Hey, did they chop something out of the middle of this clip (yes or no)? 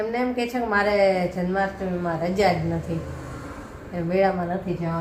no